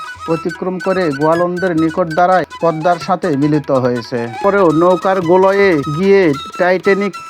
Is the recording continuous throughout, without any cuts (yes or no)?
no